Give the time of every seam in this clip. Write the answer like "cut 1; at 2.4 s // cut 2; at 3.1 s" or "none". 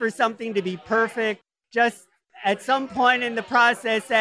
cut 1; at 1.5 s